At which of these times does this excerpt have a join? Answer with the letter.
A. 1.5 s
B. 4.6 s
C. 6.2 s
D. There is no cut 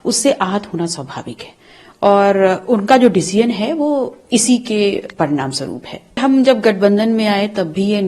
C